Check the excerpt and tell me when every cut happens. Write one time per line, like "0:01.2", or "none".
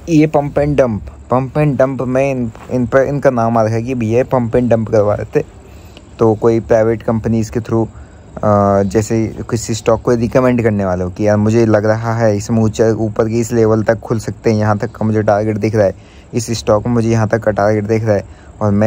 none

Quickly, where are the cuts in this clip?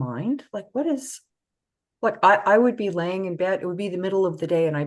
none

